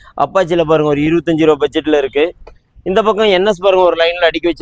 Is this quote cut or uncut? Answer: uncut